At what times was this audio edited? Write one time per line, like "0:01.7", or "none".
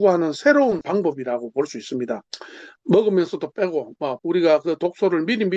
0:00.8
0:04.2